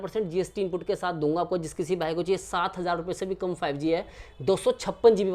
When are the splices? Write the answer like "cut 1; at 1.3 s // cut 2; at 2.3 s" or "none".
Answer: none